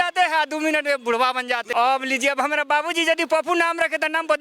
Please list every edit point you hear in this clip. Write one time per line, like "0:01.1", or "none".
0:01.7

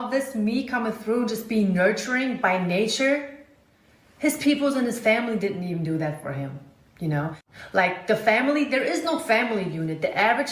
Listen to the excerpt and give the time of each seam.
0:07.8

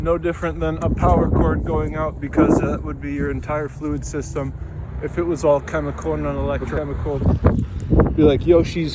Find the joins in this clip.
0:06.7

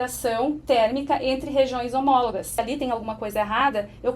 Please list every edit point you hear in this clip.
0:02.6

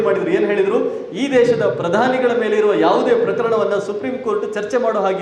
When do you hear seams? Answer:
none

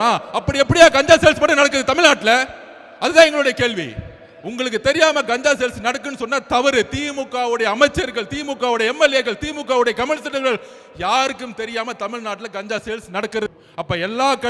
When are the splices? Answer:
0:13.5

